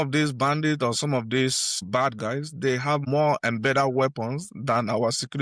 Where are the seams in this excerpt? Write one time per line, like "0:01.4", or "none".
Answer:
0:01.8

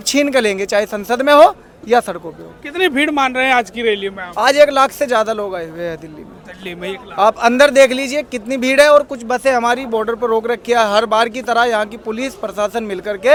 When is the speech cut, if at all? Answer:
none

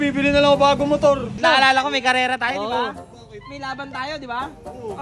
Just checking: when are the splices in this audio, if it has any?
0:01.4

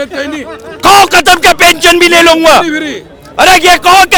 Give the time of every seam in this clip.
none

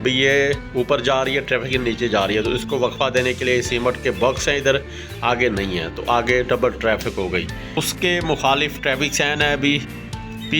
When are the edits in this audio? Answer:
0:07.8

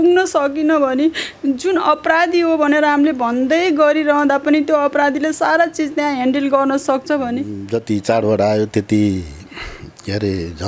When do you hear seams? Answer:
0:07.6

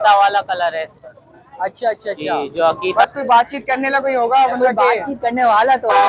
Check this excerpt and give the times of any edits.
0:03.0

